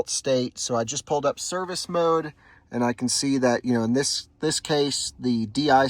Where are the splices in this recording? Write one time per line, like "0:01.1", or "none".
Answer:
none